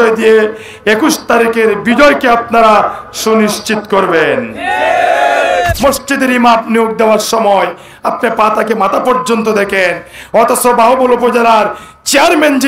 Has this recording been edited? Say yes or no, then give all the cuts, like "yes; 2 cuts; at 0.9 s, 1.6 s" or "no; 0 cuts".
yes; 1 cut; at 5.7 s